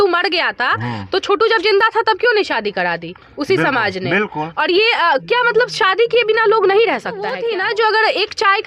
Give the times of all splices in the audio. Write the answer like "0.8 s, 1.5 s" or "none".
7.4 s

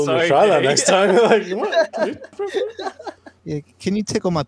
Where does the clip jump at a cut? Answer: 2.4 s, 3.3 s

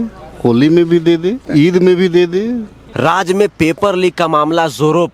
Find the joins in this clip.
1.4 s, 2.8 s

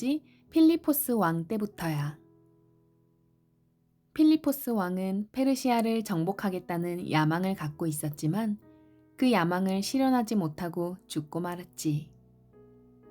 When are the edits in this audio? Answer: 12.1 s

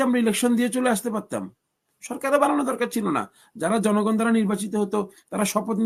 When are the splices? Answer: none

